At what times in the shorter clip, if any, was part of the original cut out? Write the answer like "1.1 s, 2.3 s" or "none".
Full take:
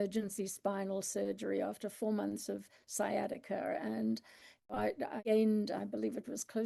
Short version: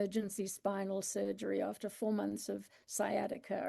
none